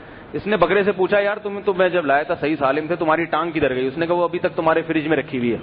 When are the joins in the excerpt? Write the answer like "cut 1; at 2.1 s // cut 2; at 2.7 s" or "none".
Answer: cut 1; at 1.4 s